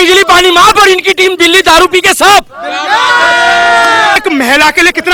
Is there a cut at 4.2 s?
yes; 1 cut; at 4.2 s

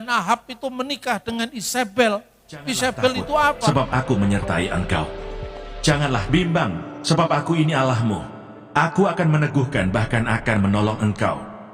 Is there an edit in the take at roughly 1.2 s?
no; 1 cut; at 3.7 s

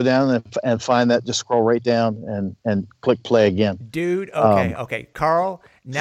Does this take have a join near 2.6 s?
no; 1 cut; at 5.1 s

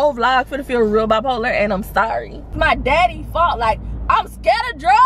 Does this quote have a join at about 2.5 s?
yes; 1 cut; at 2.5 s

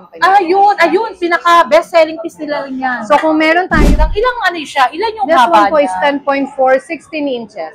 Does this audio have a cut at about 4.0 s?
yes; 1 cut; at 4.0 s

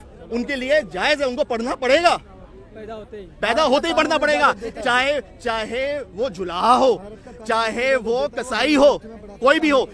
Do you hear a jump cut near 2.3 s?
no; 0 cuts

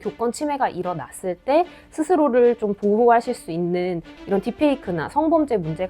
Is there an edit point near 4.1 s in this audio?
yes; 1 cut; at 4.1 s

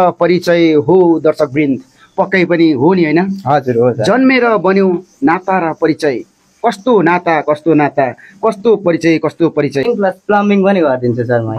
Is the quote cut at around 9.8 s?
yes; 1 cut; at 9.8 s

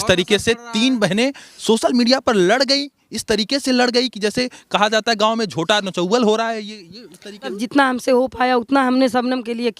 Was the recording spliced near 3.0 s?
no; 1 cut; at 7.5 s

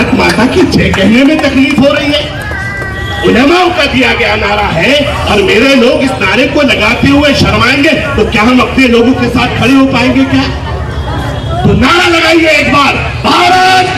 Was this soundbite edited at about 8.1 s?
no; 0 cuts

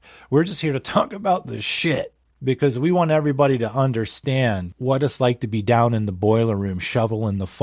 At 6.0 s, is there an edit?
no; 2 cuts; at 2.2 s, 4.7 s

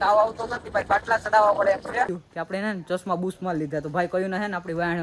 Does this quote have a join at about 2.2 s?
yes; 1 cut; at 2.2 s

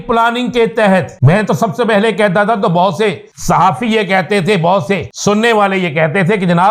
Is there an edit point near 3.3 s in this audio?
yes; 3 cuts; at 1.1 s, 3.3 s, 5.1 s

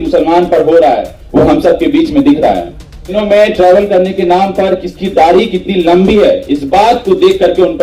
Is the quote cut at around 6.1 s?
no; 1 cut; at 3.1 s

